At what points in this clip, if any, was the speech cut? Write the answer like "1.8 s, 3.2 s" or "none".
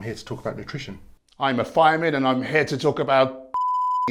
none